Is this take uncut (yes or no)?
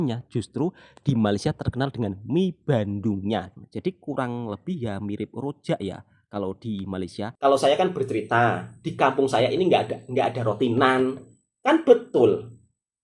no